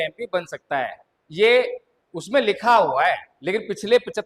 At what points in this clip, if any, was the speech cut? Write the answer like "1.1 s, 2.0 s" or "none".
3.3 s